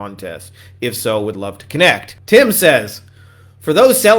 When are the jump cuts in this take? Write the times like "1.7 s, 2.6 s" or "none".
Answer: 2.1 s